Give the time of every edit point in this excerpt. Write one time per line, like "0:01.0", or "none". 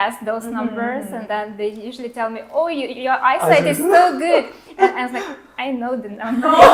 none